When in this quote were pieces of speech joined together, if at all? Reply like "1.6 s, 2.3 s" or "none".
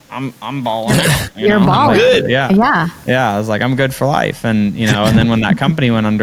none

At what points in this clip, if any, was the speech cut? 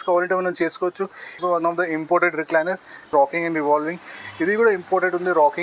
1.4 s, 3.1 s

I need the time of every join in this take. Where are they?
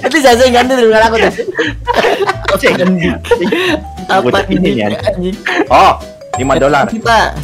5.7 s

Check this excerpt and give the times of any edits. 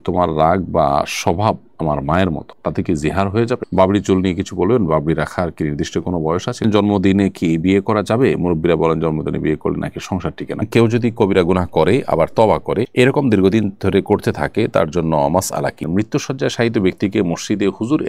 3.7 s, 6.6 s, 10.6 s, 15.9 s

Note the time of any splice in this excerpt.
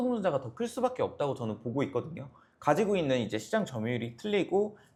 none

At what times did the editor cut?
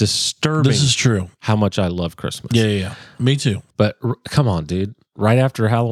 3.6 s

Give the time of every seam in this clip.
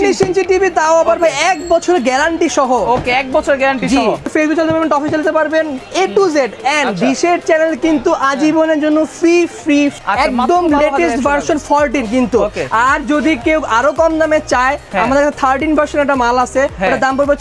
4.2 s, 10.0 s

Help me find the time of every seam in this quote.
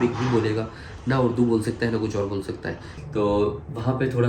2.9 s

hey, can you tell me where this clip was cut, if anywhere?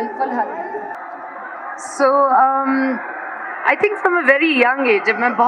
0.9 s

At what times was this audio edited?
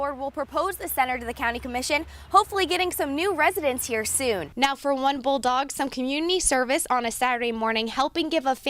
4.5 s

